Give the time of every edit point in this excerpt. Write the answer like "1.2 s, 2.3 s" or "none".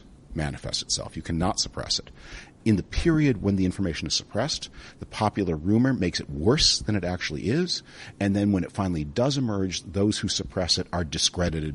2.6 s